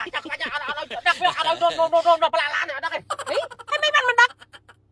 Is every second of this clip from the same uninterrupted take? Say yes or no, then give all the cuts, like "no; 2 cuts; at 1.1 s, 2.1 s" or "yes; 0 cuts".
yes; 0 cuts